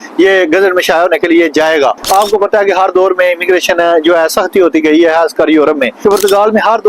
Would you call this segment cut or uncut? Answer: cut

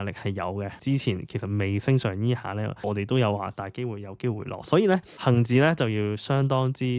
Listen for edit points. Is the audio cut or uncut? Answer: cut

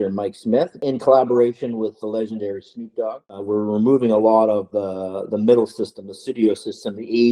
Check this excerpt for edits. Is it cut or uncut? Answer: cut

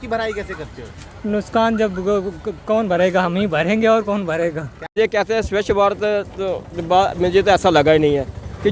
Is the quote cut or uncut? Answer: cut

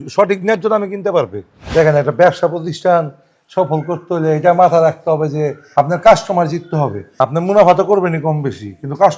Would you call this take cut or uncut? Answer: cut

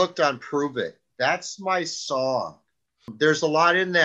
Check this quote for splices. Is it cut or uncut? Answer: cut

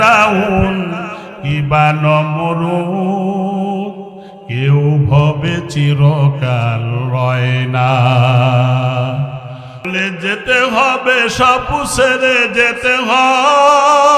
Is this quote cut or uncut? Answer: cut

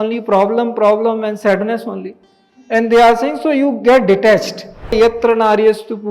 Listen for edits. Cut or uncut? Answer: cut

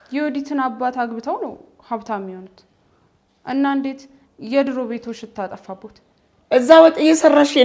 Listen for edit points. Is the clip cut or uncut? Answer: uncut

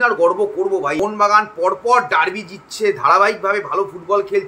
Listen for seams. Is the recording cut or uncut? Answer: cut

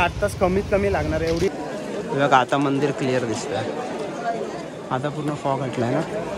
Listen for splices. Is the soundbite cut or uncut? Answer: cut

